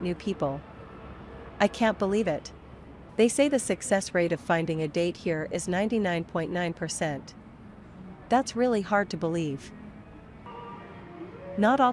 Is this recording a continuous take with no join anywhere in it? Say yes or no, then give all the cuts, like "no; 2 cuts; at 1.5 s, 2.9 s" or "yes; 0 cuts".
no; 1 cut; at 10.5 s